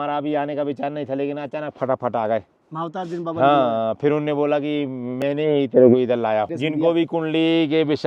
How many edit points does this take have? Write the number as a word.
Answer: one